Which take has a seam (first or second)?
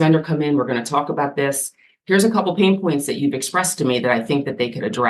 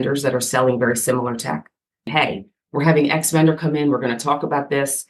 second